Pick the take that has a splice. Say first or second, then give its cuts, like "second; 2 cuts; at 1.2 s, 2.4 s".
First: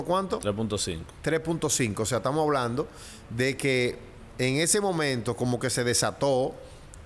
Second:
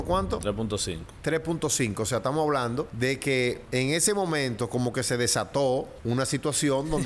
second; 3 cuts; at 2.9 s, 3.6 s, 5.9 s